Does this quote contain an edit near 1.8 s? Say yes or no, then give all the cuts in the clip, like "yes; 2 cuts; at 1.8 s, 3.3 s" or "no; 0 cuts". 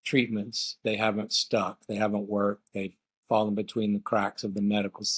no; 0 cuts